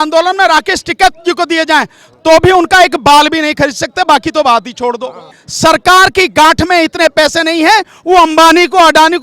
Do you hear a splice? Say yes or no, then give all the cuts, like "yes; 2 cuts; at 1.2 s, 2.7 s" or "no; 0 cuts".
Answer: yes; 1 cut; at 5.4 s